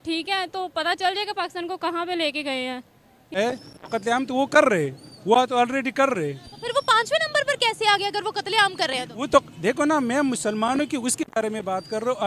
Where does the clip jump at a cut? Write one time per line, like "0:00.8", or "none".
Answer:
0:03.4